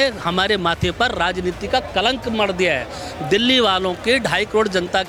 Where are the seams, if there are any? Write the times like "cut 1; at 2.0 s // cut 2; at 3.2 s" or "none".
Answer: none